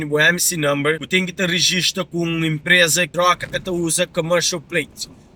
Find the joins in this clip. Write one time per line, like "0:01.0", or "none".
0:01.0
0:03.1